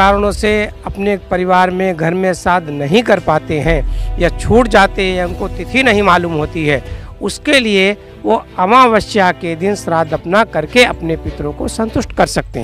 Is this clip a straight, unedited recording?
yes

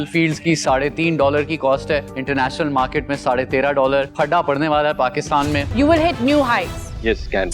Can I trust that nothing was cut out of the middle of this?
no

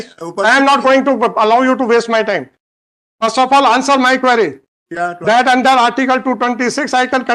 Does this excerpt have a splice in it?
no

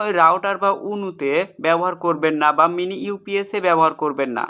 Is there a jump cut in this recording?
no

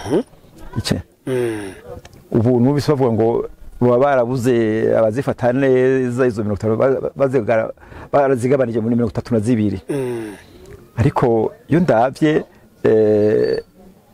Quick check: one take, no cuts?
no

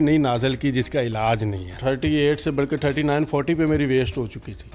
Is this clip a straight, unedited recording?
no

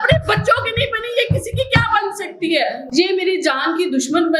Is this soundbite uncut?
no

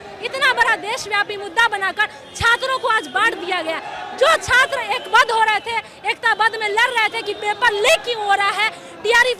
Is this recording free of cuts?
yes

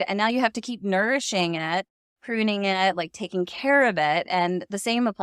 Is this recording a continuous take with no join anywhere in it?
yes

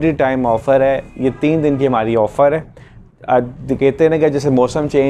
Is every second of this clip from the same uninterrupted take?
yes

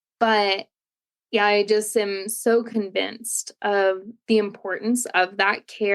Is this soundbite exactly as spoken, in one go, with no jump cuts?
no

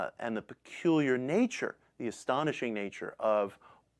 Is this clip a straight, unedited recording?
no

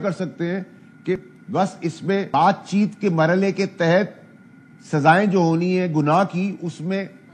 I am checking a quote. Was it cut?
yes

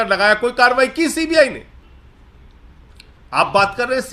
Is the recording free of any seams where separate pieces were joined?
no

